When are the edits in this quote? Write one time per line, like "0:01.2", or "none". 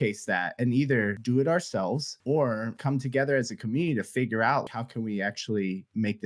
0:01.2
0:02.1
0:02.8
0:04.7